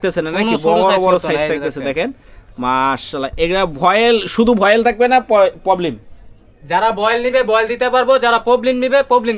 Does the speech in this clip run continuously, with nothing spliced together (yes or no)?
yes